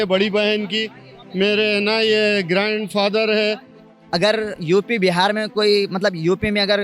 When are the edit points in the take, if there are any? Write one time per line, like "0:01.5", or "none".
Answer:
0:03.7